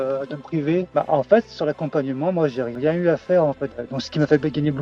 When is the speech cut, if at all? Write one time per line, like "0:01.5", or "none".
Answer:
0:00.9
0:02.7
0:03.7

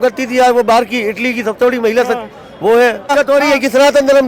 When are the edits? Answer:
0:03.1

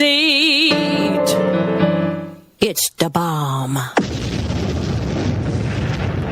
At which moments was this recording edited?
none

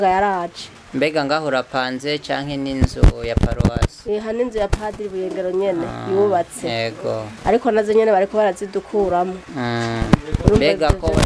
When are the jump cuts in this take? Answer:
none

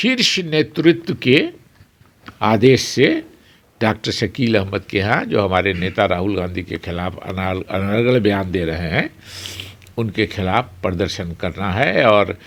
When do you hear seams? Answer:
none

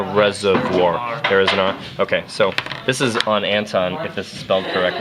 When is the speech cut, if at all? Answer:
0:02.5

